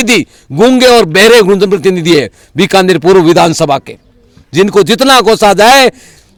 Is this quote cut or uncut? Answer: uncut